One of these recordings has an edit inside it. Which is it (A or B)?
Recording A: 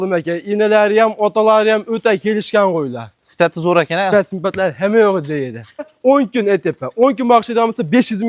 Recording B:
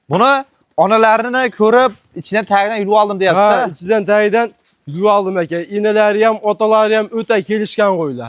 A